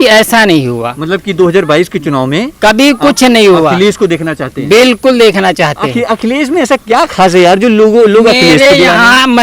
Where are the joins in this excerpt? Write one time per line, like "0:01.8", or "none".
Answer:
none